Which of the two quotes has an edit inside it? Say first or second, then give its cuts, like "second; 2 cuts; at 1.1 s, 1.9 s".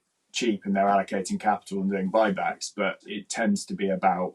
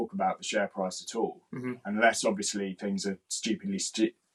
first; 1 cut; at 3.1 s